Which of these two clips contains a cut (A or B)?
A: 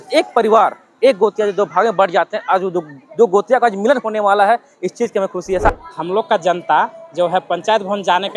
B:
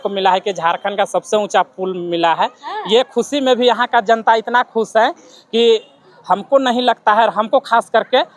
A